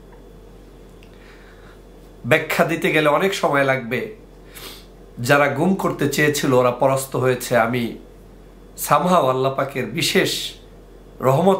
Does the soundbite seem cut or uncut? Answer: uncut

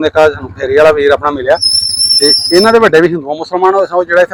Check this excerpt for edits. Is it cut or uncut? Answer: uncut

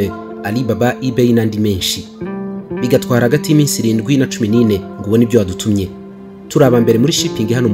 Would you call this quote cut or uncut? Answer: uncut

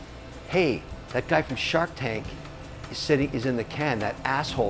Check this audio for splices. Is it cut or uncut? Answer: cut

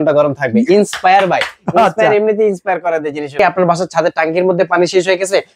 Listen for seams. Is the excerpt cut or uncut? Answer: cut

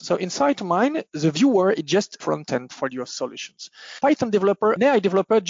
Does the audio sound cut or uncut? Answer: cut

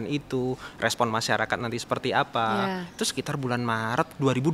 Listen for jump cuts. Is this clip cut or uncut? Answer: uncut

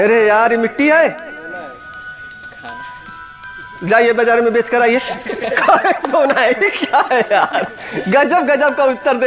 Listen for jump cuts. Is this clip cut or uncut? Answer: uncut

